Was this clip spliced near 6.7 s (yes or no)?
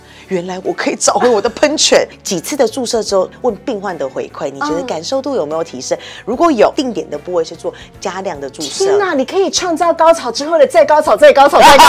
yes